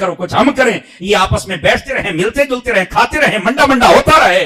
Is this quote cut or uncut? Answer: uncut